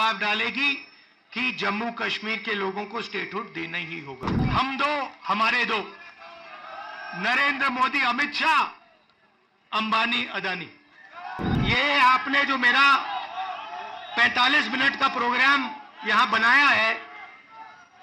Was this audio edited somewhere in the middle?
yes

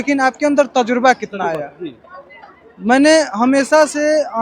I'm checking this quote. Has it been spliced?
no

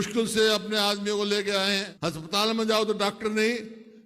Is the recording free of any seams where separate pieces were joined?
no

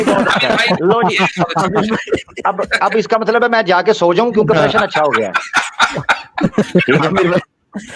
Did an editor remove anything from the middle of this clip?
no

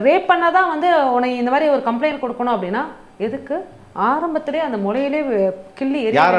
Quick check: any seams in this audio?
no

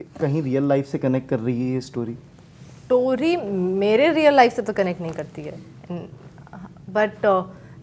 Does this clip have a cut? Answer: no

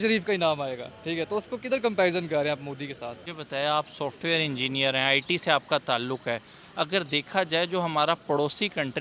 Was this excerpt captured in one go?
no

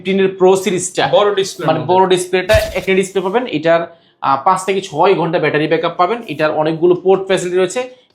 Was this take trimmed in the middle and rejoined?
yes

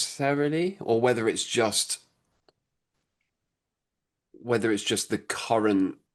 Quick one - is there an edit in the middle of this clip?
no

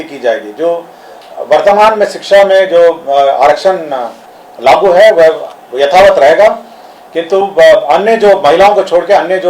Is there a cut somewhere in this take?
no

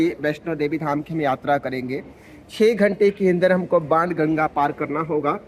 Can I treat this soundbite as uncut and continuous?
yes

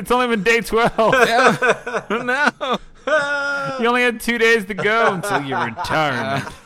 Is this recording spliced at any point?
no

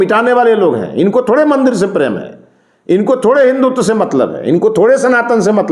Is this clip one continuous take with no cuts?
yes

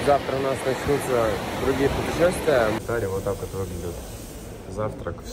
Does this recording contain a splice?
yes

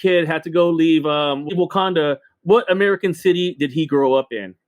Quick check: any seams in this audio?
yes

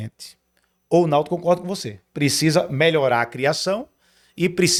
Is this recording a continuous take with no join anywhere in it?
yes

